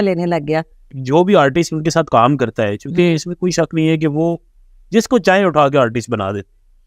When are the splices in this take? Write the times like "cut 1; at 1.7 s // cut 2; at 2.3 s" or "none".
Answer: cut 1; at 1.0 s

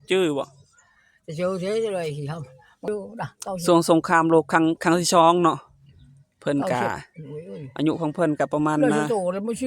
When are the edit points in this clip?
cut 1; at 2.9 s

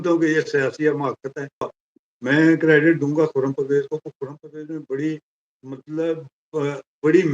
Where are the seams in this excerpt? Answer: cut 1; at 1.8 s

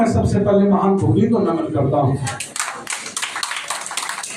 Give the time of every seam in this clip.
none

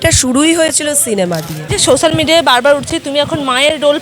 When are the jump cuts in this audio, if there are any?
cut 1; at 1.7 s

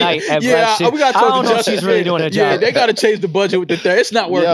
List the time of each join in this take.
none

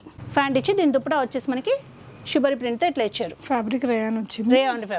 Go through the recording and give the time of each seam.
none

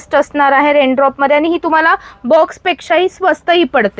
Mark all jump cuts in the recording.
none

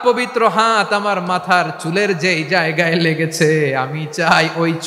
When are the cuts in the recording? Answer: none

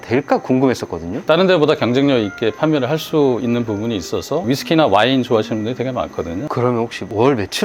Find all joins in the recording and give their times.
cut 1; at 1.2 s // cut 2; at 4.4 s // cut 3; at 6.4 s

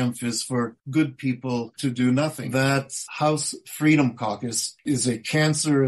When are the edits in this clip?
cut 1; at 2.7 s // cut 2; at 4.8 s

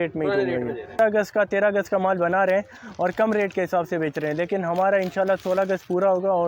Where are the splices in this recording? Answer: cut 1; at 1.0 s

